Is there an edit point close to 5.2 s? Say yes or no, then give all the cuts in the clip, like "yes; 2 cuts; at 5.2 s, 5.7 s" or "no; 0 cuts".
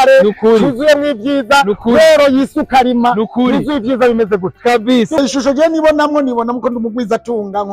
yes; 1 cut; at 5.2 s